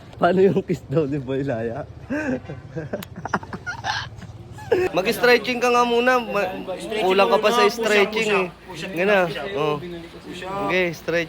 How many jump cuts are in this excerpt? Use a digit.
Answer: 1